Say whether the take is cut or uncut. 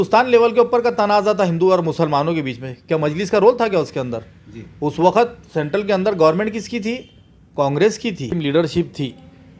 cut